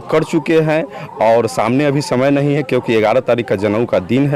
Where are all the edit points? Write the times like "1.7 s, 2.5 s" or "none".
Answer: none